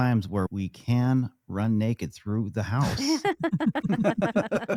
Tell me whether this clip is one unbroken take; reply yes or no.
yes